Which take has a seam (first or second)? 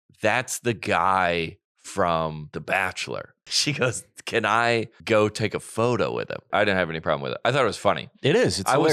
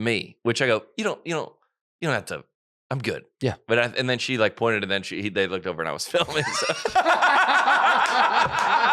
first